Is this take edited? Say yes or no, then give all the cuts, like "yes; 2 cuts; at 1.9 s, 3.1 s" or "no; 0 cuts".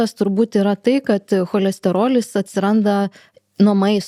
no; 0 cuts